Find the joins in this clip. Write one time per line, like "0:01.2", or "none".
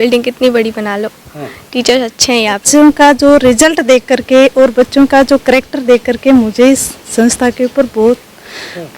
0:02.6